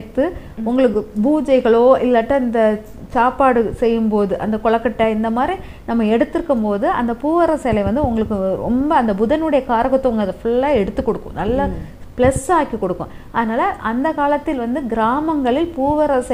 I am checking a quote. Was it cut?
no; 0 cuts

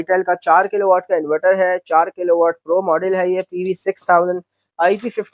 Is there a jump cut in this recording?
no; 0 cuts

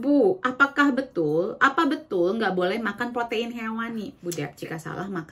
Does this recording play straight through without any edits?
no; 1 cut; at 4.1 s

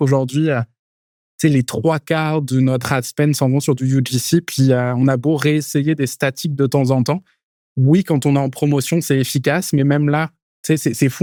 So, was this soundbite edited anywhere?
no; 0 cuts

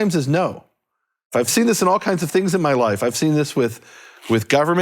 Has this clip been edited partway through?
yes; 1 cut; at 1.5 s

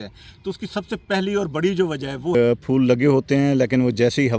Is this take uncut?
no; 1 cut; at 2.3 s

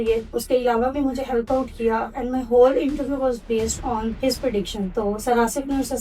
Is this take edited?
yes; 1 cut; at 4.9 s

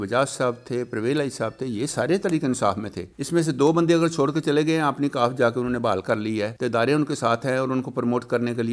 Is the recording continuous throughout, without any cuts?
yes; 0 cuts

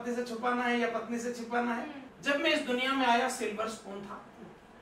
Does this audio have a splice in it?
yes; 1 cut; at 2.1 s

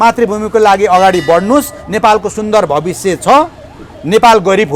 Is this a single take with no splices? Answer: yes; 0 cuts

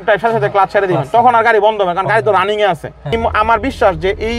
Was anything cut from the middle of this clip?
yes; 1 cut; at 3.1 s

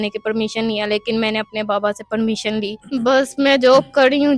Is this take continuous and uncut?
no; 1 cut; at 2.8 s

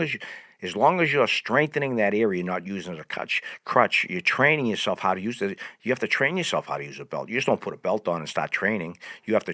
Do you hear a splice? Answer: no; 0 cuts

